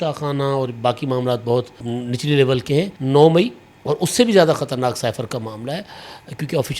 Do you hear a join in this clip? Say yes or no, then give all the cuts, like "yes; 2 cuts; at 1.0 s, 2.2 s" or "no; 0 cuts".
yes; 2 cuts; at 1.8 s, 3.0 s